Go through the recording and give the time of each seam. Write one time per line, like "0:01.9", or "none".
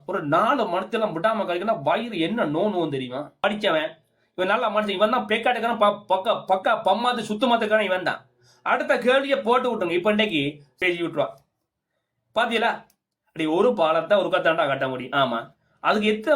0:03.4
0:10.8